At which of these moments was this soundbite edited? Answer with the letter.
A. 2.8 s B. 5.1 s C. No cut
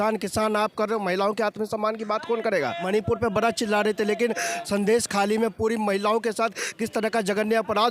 A